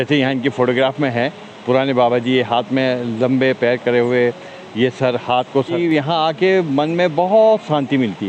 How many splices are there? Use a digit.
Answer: 1